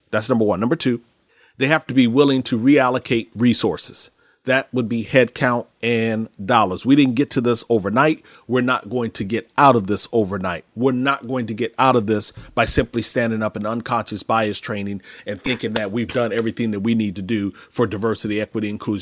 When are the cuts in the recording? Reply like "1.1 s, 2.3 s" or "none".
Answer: none